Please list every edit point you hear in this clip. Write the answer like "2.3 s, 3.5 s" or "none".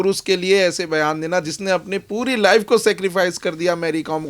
none

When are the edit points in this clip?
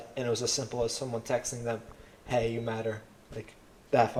none

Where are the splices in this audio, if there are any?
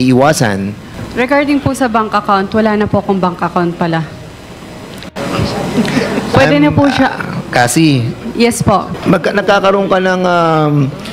8.9 s

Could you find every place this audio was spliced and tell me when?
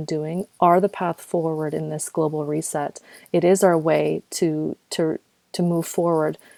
none

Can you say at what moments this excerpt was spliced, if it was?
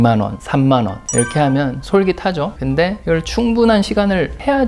2.7 s

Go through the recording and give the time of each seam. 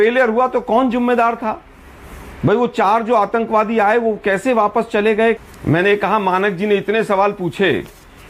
5.4 s

